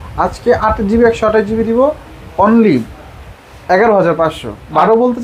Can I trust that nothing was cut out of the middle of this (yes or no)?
yes